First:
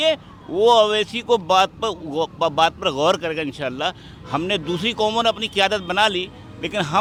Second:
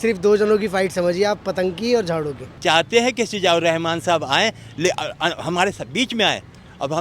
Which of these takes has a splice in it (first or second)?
second